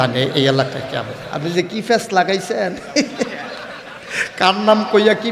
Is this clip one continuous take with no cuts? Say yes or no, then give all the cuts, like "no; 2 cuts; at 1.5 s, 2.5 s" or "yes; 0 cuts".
no; 1 cut; at 1.2 s